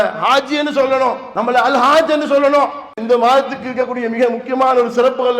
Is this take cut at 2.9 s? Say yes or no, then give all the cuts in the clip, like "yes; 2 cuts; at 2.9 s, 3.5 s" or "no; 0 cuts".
yes; 2 cuts; at 1.3 s, 2.9 s